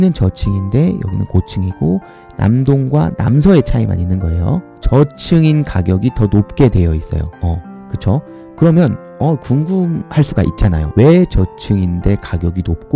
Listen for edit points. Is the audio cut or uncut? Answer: cut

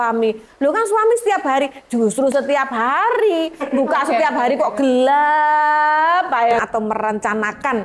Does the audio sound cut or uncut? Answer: cut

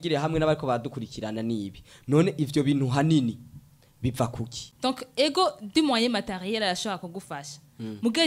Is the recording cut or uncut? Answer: cut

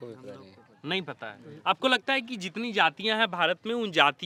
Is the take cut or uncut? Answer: uncut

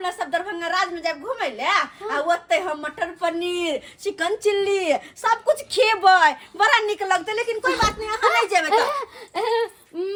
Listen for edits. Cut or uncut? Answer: uncut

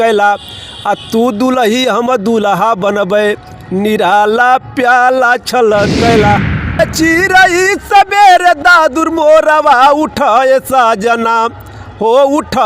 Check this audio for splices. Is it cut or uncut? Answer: cut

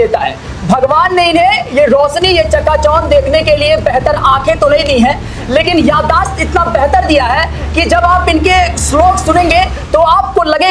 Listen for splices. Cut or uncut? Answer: uncut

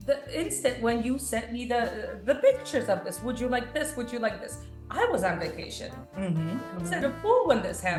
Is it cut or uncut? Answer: uncut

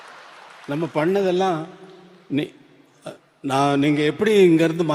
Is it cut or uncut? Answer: uncut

